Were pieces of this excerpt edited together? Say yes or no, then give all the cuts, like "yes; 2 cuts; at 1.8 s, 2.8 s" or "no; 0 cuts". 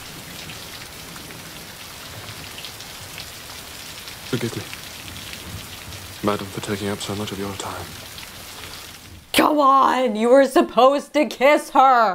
yes; 1 cut; at 9.2 s